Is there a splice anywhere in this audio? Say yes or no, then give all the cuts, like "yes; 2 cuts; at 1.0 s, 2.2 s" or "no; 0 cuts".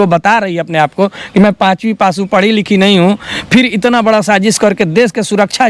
no; 0 cuts